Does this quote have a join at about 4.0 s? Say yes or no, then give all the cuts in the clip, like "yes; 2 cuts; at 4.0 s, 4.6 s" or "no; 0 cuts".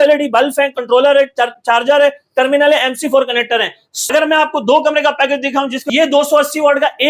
yes; 2 cuts; at 4.0 s, 5.8 s